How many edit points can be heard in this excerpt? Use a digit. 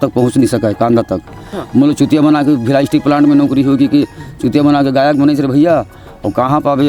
1